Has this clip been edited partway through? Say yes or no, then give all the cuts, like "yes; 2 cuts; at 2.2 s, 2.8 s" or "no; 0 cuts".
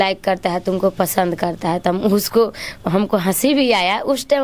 no; 0 cuts